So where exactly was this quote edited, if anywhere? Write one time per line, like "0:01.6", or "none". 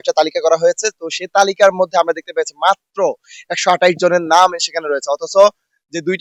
none